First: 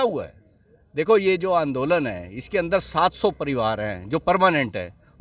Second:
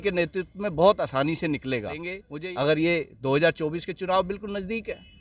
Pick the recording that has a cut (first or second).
second